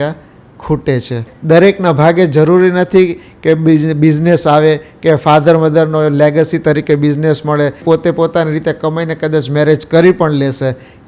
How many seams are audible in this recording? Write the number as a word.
two